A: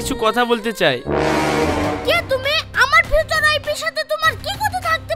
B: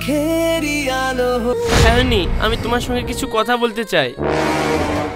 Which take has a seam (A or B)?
B